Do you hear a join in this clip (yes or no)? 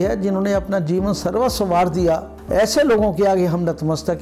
yes